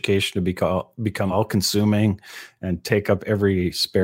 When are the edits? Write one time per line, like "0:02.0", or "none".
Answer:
none